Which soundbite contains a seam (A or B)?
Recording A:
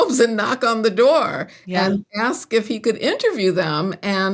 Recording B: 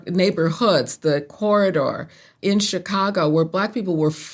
B